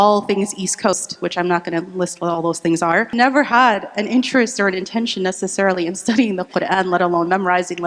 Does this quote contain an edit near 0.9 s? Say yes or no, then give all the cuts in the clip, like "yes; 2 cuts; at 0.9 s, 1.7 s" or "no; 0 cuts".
yes; 2 cuts; at 0.9 s, 3.1 s